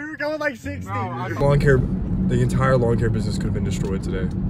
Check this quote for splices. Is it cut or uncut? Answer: cut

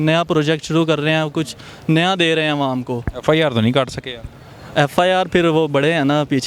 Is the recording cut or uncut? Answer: uncut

